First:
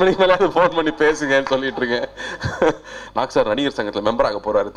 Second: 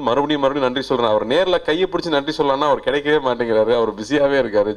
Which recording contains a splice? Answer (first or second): first